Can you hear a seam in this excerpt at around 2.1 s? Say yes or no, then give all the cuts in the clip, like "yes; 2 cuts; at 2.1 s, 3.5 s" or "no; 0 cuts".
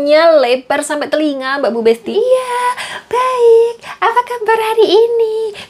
yes; 1 cut; at 2.1 s